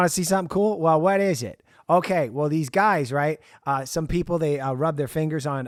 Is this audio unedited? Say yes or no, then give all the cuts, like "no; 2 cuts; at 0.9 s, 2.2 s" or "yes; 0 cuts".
yes; 0 cuts